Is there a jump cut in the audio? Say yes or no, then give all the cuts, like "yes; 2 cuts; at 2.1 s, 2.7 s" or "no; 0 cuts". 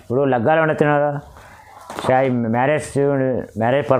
no; 0 cuts